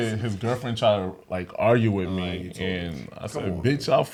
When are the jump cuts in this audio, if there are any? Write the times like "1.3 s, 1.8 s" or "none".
none